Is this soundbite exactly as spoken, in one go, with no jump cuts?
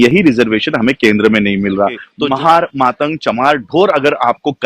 no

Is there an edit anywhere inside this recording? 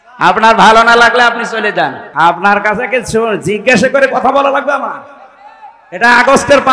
yes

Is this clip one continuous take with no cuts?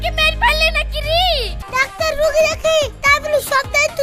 no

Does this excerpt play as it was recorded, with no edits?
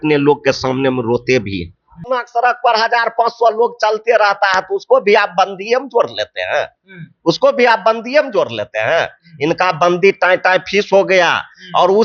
no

